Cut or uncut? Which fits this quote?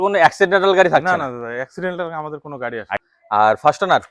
cut